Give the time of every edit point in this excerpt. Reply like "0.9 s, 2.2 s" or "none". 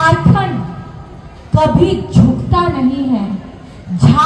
none